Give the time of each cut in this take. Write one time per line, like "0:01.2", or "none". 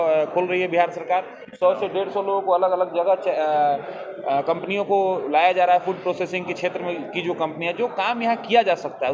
none